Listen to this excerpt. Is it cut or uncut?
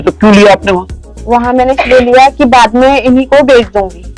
uncut